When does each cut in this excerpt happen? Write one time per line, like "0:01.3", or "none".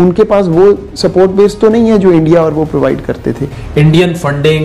0:03.6

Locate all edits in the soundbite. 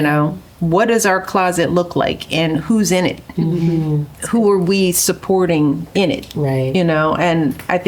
0:03.5

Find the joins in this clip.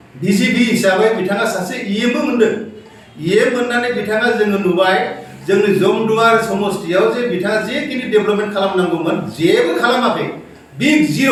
none

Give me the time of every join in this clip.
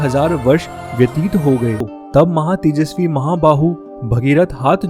0:02.0

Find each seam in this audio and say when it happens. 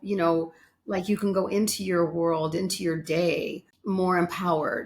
0:03.7

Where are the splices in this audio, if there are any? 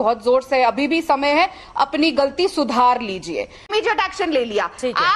0:03.6

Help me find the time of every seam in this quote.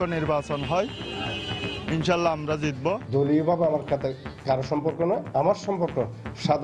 0:03.0

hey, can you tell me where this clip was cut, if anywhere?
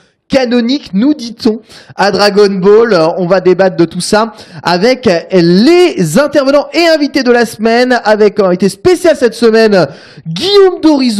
none

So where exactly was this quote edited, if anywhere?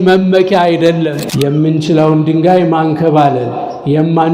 0:01.2

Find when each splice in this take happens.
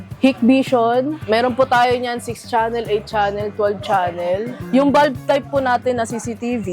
0:01.2
0:04.5

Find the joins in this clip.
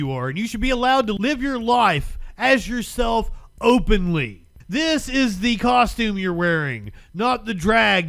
0:01.2
0:04.6

